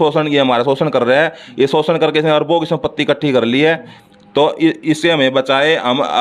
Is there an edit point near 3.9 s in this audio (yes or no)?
no